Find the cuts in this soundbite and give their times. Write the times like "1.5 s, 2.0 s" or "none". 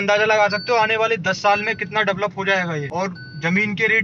2.9 s